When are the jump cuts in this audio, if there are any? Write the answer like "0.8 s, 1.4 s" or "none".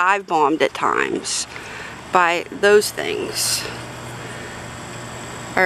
none